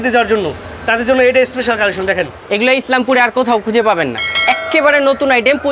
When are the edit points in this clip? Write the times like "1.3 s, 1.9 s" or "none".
2.3 s